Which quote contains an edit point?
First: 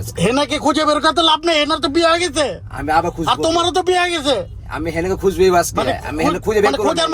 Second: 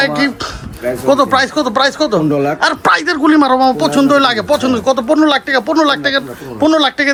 first; 1 cut; at 6.1 s

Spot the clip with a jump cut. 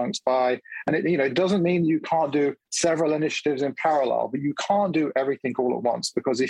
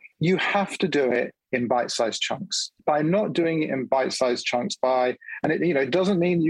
second; 1 cut; at 2.8 s

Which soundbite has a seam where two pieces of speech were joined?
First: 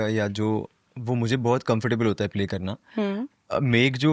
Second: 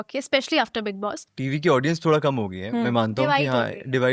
second; 1 cut; at 1.3 s

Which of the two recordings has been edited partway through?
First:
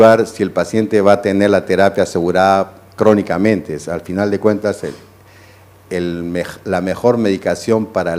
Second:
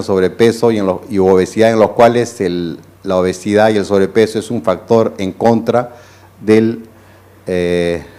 first; 1 cut; at 7.0 s

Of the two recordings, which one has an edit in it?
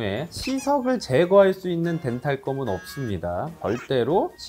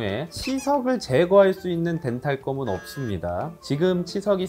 first; 1 cut; at 3.6 s

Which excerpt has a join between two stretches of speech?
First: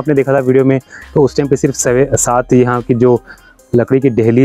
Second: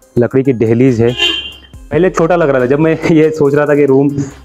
second; 1 cut; at 1.9 s

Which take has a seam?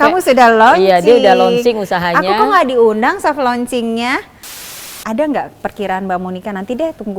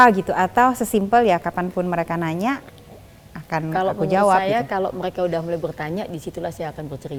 first; 1 cut; at 4.7 s

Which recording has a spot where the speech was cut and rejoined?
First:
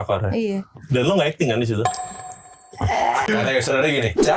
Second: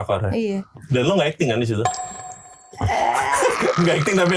first; 1 cut; at 3.3 s

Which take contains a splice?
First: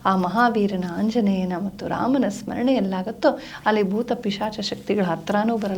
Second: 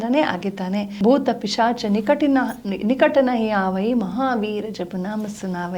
second; 1 cut; at 0.9 s

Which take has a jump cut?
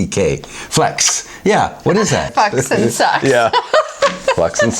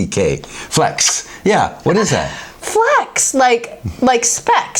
first; 1 cut; at 2.3 s

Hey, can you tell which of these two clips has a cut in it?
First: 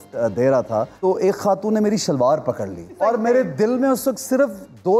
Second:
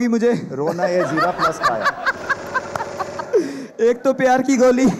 first; 2 cuts; at 0.9 s, 2.9 s

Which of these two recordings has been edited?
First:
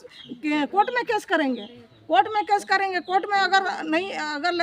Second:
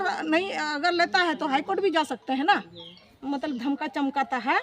second; 1 cut; at 3.1 s

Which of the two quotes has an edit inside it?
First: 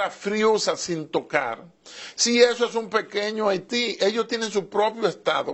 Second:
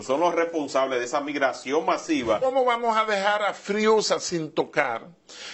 second; 1 cut; at 2.4 s

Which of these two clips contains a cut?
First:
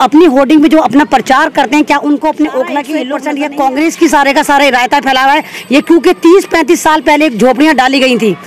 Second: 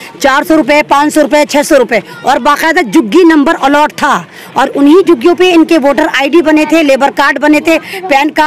first; 1 cut; at 3.1 s

